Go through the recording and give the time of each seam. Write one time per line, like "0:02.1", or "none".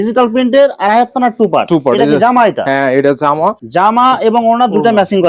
0:03.6